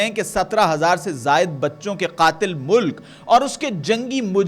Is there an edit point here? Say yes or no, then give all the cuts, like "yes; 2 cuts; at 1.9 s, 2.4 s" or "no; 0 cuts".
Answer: no; 0 cuts